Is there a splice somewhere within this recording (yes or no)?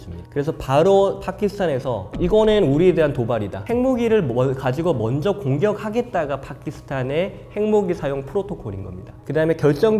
yes